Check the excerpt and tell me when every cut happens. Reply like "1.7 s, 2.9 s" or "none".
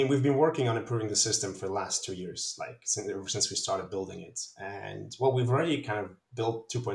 none

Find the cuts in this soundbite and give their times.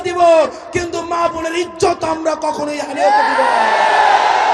none

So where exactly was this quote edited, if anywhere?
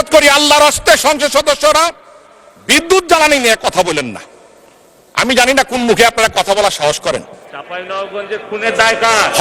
none

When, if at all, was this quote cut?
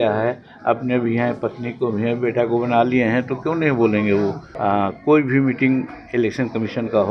4.5 s

